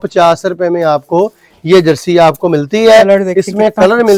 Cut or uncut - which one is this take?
uncut